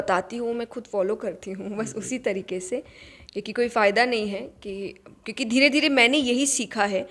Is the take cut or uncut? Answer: uncut